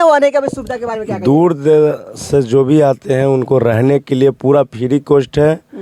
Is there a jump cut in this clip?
no; 0 cuts

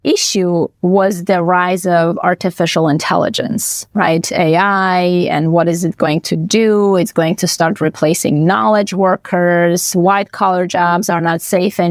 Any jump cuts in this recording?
no; 0 cuts

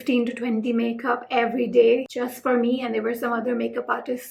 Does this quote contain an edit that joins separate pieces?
no; 0 cuts

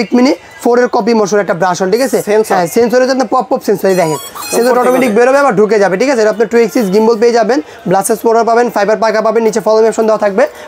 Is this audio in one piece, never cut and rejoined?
yes; 0 cuts

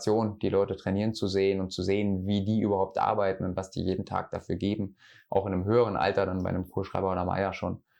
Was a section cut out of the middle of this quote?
no; 0 cuts

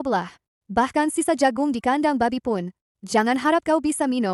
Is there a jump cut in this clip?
no; 0 cuts

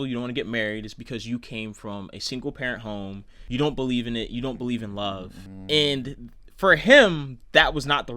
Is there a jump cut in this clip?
yes; 1 cut; at 3.4 s

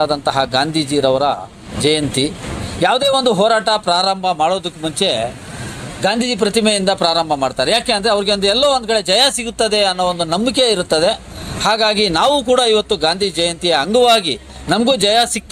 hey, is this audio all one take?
yes; 0 cuts

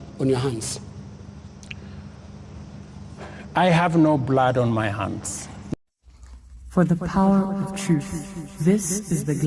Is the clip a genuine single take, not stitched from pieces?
no; 1 cut; at 5.7 s

